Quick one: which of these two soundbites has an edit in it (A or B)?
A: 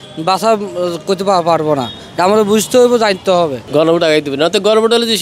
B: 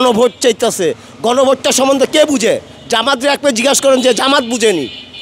A